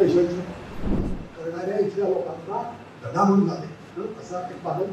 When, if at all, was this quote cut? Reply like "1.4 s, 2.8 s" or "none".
1.0 s